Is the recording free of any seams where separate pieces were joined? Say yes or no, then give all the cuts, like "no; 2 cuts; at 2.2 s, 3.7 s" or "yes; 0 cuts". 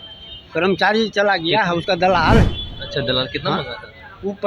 yes; 0 cuts